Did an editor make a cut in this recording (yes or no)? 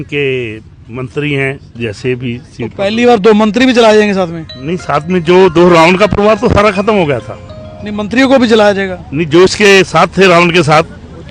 no